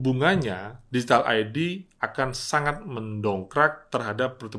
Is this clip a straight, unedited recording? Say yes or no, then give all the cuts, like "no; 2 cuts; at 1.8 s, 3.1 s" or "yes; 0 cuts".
yes; 0 cuts